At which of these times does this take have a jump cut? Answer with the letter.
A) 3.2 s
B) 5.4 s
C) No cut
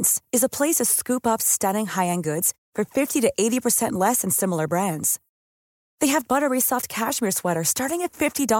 C